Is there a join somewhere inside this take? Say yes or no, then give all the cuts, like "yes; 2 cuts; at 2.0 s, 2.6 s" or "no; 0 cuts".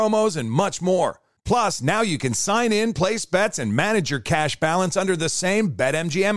no; 0 cuts